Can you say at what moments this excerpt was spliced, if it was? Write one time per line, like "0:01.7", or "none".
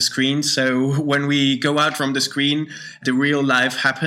0:01.9
0:03.0